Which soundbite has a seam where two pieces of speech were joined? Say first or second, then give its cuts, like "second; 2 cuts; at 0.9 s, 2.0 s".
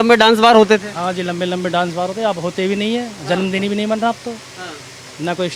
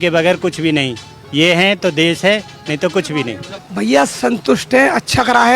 second; 1 cut; at 3.5 s